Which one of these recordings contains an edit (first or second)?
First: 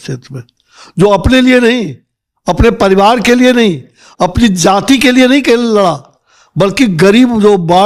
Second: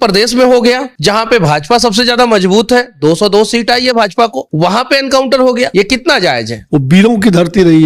second